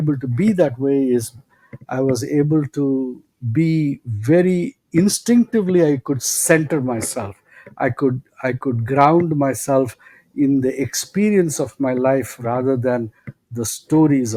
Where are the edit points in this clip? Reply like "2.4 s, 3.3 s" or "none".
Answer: none

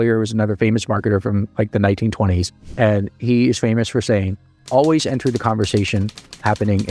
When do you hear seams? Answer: none

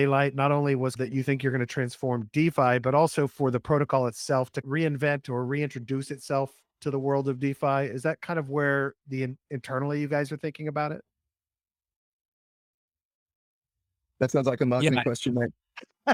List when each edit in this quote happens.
none

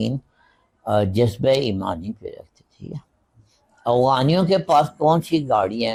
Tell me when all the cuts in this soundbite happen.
none

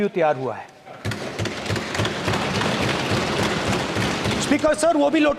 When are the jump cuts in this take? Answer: none

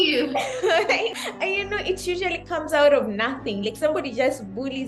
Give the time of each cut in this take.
1.1 s

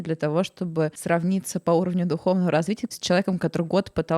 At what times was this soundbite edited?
1.0 s, 2.9 s

